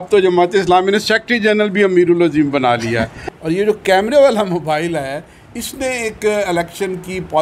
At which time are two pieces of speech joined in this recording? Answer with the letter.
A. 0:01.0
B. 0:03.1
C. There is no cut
B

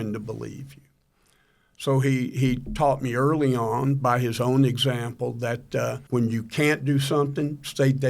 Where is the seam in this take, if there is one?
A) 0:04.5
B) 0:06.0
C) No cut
B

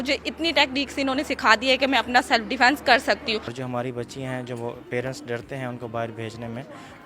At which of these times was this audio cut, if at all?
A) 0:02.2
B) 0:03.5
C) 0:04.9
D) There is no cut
B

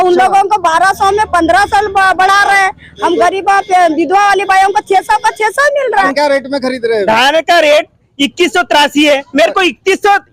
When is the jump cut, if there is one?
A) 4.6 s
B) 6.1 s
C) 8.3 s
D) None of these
B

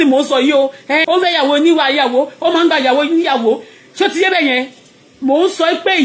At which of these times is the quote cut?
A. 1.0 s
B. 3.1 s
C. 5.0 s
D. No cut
A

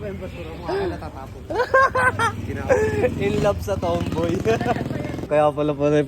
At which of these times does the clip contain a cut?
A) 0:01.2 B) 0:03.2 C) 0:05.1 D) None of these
C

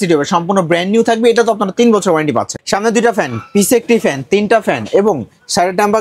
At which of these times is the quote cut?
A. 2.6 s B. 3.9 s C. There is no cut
A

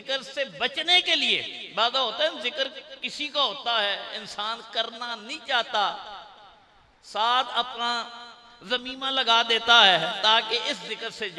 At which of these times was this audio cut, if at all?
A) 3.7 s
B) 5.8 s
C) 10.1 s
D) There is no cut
D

